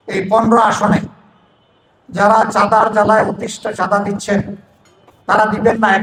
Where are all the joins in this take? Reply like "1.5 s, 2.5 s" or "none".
none